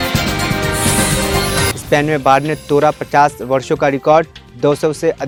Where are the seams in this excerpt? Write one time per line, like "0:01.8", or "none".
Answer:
none